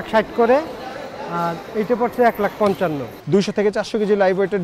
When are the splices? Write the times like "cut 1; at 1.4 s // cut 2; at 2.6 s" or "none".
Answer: cut 1; at 3.1 s